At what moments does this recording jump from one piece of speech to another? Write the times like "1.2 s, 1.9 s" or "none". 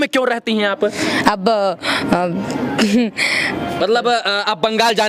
3.8 s